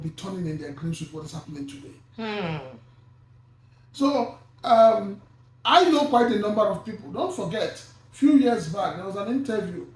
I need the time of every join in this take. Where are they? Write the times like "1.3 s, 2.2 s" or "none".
none